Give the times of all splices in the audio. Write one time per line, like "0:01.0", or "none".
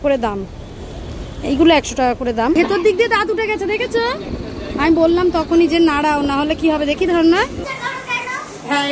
0:02.6
0:07.6